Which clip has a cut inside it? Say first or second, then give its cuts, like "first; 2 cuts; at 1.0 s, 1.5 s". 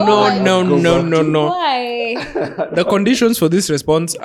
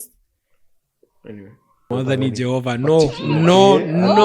second; 1 cut; at 1.9 s